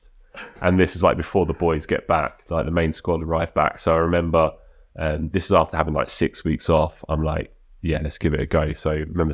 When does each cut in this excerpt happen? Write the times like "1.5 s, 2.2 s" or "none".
none